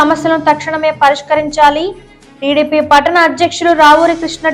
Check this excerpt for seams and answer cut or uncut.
uncut